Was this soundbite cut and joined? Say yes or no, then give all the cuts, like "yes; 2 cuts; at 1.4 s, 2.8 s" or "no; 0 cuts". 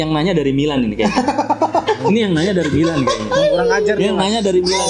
no; 0 cuts